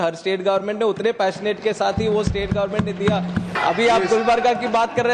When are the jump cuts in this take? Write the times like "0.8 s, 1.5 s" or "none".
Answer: 3.5 s